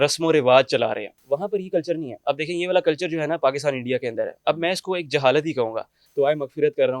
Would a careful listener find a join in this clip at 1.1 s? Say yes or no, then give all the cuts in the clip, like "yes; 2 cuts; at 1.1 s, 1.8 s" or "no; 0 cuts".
yes; 2 cuts; at 1.1 s, 6.1 s